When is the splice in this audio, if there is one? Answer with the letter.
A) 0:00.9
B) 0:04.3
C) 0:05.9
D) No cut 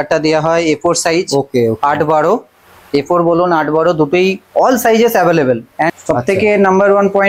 C